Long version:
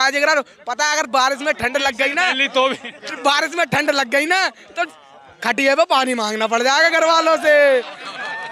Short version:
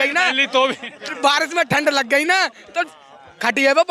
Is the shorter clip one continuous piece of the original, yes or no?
yes